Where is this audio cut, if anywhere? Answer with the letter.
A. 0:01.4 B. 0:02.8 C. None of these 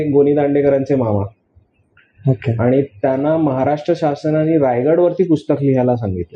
C